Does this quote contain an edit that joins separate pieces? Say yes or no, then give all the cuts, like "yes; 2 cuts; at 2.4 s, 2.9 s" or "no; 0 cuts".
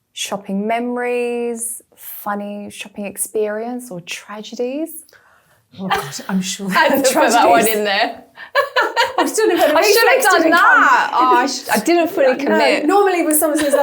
no; 0 cuts